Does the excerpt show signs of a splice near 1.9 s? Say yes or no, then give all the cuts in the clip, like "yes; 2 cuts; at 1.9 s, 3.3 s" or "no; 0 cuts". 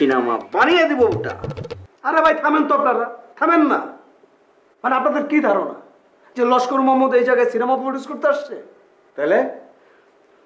yes; 1 cut; at 1.9 s